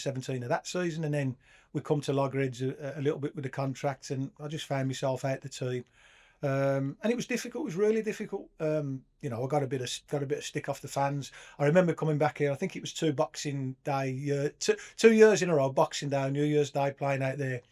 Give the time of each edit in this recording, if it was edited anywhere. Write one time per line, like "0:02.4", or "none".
none

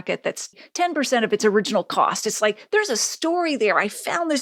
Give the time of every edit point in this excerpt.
none

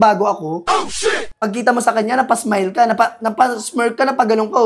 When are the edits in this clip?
0:01.3

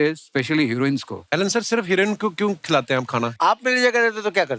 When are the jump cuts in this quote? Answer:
0:01.2
0:03.3

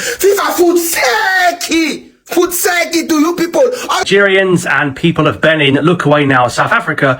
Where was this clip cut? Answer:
0:04.0

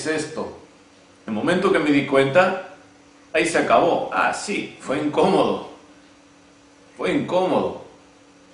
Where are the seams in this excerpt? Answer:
0:01.2

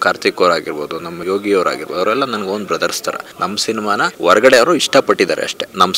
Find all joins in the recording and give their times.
0:01.2
0:03.3
0:04.1

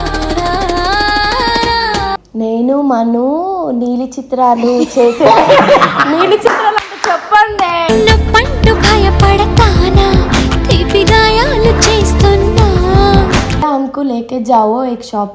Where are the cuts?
0:13.6

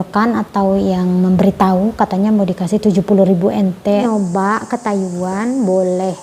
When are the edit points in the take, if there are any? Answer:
0:04.0

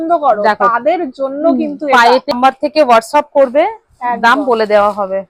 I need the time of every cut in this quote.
0:02.3

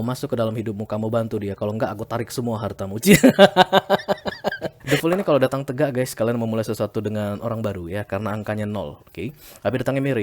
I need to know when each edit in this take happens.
0:04.7

